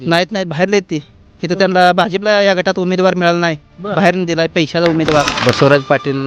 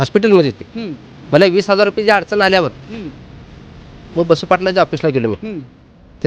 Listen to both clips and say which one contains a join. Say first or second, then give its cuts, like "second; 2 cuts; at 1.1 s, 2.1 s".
first; 1 cut; at 5.3 s